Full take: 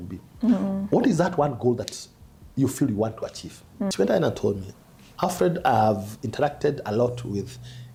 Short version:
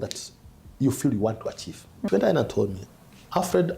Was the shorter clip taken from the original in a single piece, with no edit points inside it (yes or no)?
no